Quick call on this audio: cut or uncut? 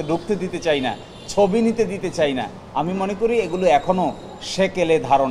uncut